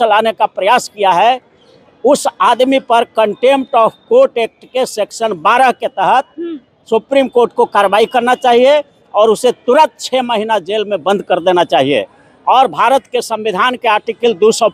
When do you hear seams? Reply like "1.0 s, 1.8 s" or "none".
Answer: none